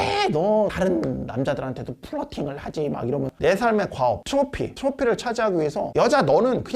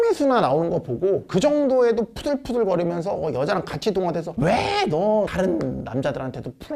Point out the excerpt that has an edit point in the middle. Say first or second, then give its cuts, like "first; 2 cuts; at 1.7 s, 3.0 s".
first; 1 cut; at 3.3 s